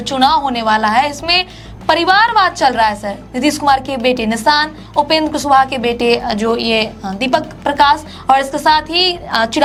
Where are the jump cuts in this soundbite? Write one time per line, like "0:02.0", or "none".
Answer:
none